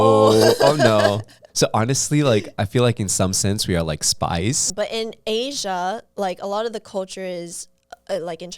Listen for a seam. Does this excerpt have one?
yes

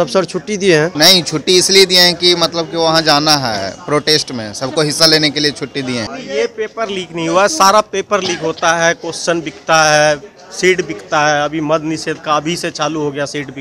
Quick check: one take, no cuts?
no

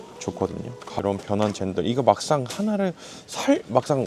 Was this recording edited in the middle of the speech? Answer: yes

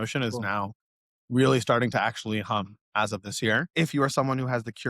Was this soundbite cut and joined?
yes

